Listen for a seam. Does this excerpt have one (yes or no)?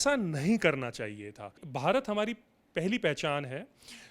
yes